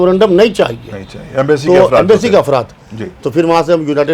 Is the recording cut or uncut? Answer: uncut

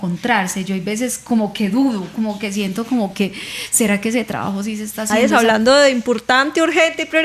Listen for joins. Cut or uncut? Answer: cut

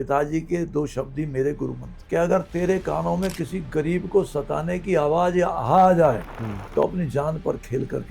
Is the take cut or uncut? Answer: cut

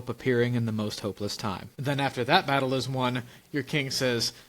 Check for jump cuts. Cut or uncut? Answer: cut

